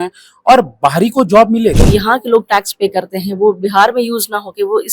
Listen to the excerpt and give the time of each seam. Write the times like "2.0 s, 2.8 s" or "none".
1.8 s